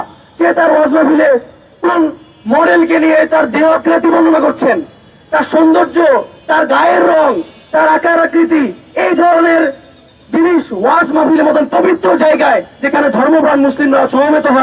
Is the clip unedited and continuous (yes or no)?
yes